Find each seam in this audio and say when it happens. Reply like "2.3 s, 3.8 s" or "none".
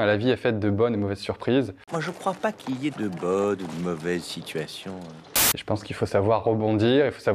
none